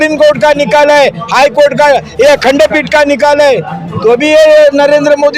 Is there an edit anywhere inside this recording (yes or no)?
no